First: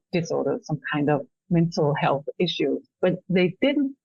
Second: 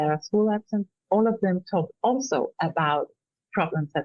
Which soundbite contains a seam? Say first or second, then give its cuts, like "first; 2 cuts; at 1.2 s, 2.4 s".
second; 1 cut; at 0.9 s